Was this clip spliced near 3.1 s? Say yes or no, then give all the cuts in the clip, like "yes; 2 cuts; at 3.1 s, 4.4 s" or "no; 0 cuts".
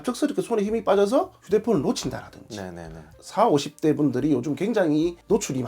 yes; 1 cut; at 3.1 s